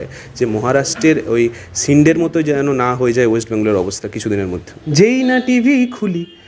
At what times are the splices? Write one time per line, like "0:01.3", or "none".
0:04.7